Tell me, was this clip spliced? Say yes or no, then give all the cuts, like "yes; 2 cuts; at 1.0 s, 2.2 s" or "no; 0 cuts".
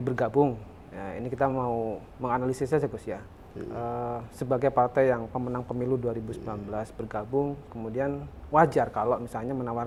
no; 0 cuts